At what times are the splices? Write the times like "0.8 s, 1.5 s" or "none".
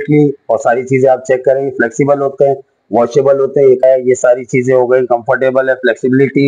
3.8 s